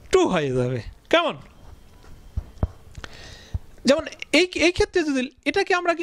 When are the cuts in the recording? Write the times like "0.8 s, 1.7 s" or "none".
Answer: none